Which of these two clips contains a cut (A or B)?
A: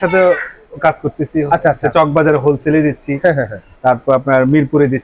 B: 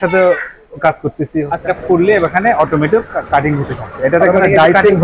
B